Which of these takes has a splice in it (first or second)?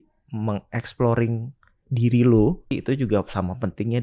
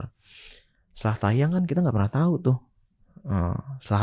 first